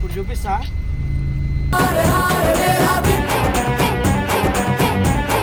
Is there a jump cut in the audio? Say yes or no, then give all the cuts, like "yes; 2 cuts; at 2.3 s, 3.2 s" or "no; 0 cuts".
no; 0 cuts